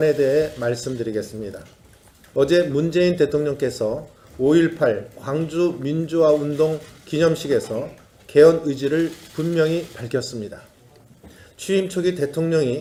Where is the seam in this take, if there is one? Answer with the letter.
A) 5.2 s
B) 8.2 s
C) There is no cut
C